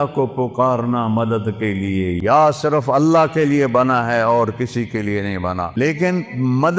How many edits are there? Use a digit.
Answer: 2